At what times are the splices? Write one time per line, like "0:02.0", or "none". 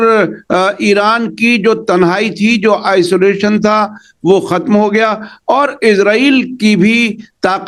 none